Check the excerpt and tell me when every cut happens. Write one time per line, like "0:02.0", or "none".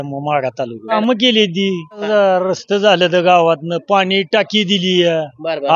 0:01.0
0:02.0

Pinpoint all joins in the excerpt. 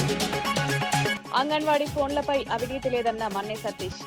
0:01.2

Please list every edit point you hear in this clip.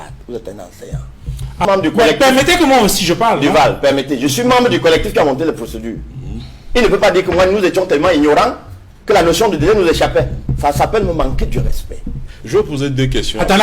0:01.6

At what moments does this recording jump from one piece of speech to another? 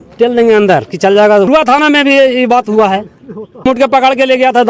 0:01.5
0:03.7

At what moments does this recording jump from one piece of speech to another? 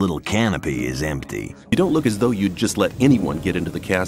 0:01.7

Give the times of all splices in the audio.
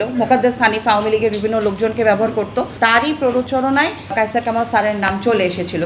0:02.7

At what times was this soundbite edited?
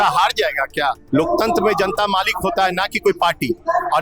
0:01.0

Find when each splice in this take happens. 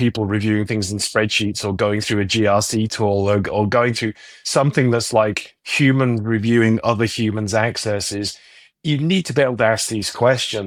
none

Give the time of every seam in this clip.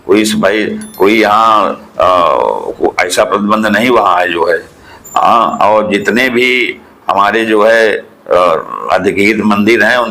none

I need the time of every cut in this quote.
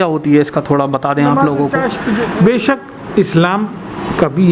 0:02.0

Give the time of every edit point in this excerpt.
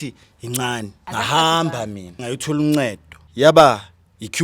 0:01.0
0:02.2
0:03.2

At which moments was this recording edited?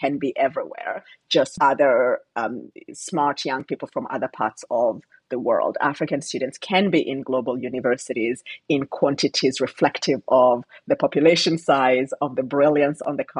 0:01.6

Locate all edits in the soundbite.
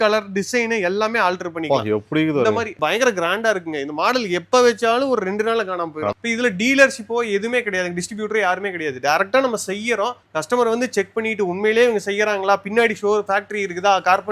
0:06.1

